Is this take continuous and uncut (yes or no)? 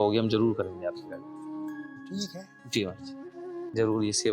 yes